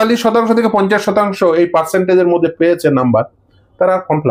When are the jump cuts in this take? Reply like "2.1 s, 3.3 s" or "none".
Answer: none